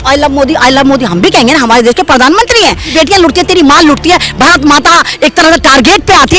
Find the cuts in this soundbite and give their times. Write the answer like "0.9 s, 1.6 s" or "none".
2.9 s